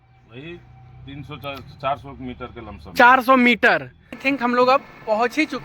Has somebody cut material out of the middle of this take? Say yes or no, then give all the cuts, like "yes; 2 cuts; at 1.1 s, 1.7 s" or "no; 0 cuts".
yes; 1 cut; at 4.2 s